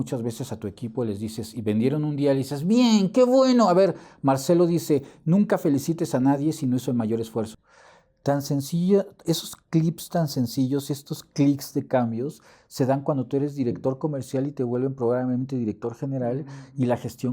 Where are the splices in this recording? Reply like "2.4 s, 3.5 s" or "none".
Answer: 7.6 s